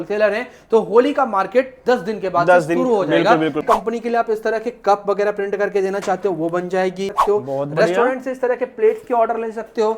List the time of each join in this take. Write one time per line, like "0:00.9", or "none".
0:03.6
0:07.1

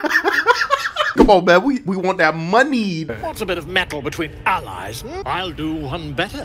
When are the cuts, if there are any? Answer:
0:01.1
0:03.3
0:05.2

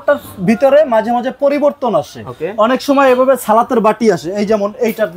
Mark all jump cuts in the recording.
none

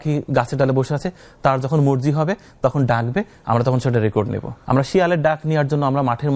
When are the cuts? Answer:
0:04.5

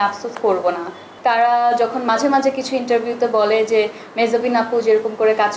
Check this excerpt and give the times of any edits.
0:01.1

